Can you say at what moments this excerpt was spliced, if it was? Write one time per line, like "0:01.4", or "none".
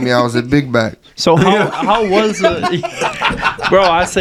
none